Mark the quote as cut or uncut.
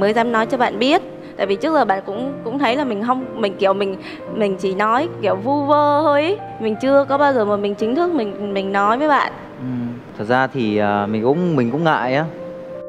uncut